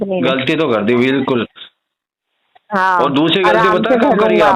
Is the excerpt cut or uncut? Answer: uncut